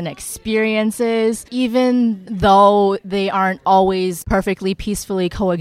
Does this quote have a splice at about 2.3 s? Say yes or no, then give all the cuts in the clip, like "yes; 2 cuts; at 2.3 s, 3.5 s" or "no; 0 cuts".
yes; 3 cuts; at 1.4 s, 2.3 s, 4.2 s